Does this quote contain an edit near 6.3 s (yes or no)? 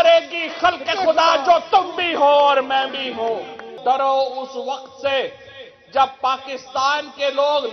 no